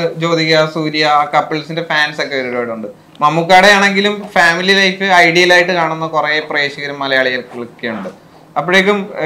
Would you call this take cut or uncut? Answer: uncut